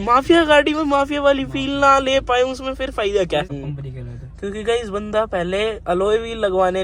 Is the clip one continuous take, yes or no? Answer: no